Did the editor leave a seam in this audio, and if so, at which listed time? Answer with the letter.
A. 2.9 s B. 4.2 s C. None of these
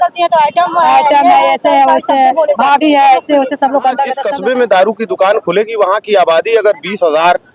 B